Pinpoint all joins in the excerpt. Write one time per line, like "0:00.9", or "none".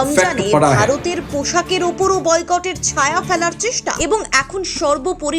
0:04.0